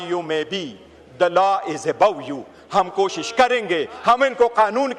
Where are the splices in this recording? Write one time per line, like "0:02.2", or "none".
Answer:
none